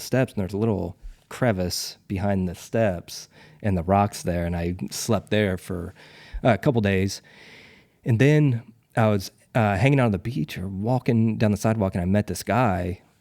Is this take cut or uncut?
uncut